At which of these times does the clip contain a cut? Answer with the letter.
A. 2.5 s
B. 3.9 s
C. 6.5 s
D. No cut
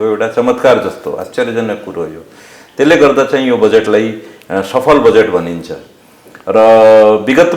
D